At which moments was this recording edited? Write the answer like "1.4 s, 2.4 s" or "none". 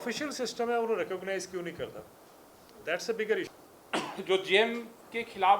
3.4 s